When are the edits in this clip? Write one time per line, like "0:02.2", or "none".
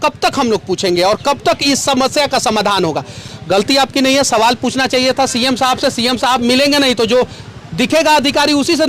none